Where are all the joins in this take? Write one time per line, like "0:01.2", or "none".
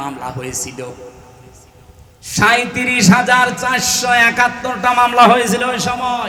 none